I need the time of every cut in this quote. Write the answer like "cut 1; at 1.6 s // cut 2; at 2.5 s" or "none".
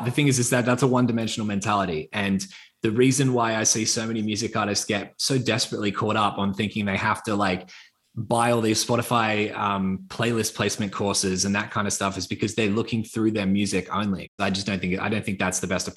cut 1; at 14.3 s